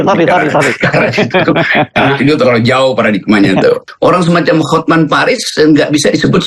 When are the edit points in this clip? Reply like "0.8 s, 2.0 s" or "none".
3.8 s